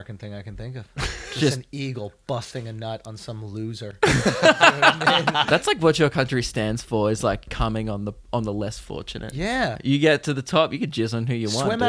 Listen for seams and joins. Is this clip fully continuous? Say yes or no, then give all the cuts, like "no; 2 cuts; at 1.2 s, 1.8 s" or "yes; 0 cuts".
no; 3 cuts; at 5.4 s, 7.5 s, 9.8 s